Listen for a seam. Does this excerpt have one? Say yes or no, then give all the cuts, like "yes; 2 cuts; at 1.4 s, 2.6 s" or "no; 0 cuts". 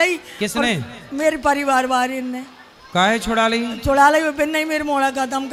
no; 0 cuts